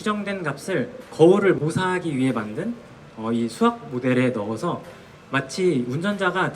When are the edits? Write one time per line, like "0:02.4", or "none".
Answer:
0:01.1
0:01.6